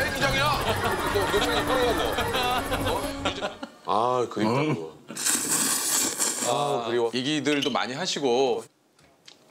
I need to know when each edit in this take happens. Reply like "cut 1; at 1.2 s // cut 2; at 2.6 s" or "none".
cut 1; at 3.2 s